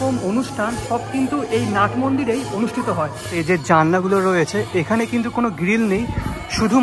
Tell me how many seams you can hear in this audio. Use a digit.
1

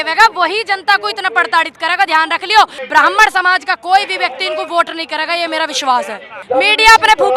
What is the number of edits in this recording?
2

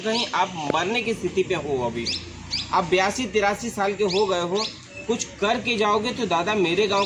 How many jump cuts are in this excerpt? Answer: 0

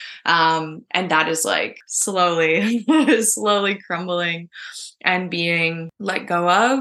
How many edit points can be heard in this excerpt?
2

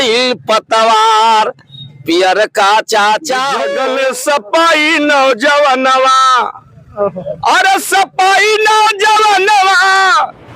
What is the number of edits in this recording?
1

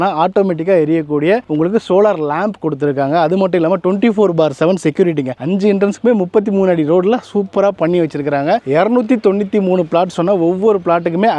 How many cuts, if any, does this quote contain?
2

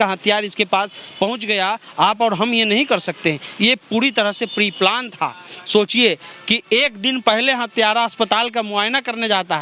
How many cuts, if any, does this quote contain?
0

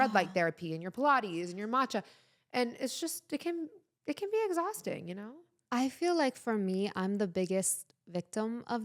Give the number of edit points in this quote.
0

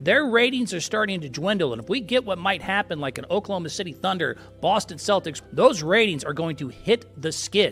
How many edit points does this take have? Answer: 1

